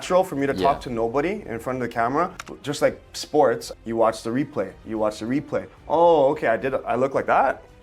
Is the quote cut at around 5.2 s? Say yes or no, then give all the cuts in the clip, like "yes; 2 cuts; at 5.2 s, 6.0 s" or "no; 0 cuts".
no; 2 cuts; at 2.5 s, 3.7 s